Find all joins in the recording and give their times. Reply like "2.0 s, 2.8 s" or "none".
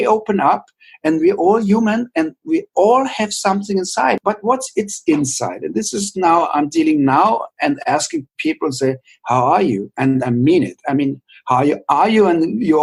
4.2 s